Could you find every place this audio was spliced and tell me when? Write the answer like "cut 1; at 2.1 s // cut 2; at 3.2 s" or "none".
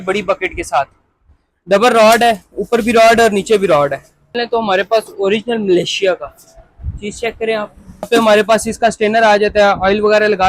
cut 1; at 4.4 s // cut 2; at 8.1 s